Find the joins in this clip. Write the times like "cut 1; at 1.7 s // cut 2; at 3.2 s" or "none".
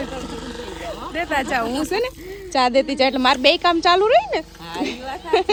none